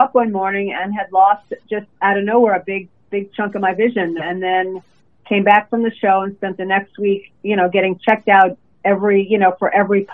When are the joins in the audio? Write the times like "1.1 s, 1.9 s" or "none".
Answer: none